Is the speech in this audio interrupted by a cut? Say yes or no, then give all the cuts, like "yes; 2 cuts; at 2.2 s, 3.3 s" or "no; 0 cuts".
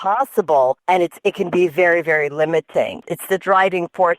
yes; 2 cuts; at 0.8 s, 3.0 s